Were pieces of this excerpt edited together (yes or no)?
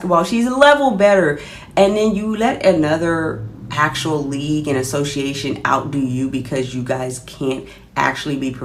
no